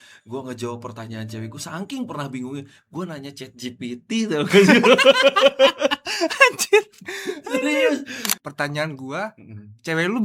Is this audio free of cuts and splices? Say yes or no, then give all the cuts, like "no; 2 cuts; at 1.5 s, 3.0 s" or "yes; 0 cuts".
no; 1 cut; at 8.3 s